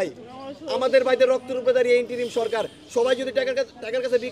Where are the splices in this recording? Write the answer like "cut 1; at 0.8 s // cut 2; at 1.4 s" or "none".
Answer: none